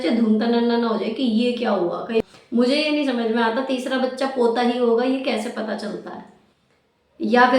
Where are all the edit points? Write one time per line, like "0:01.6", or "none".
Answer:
0:02.2